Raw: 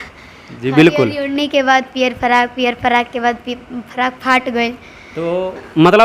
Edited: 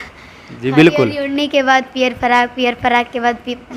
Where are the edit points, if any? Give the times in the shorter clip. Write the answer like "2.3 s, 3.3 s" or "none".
none